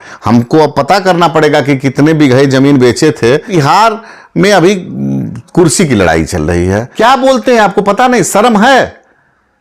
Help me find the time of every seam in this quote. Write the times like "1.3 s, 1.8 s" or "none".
3.5 s, 6.9 s